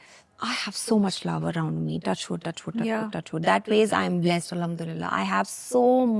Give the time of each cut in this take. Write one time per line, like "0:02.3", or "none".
none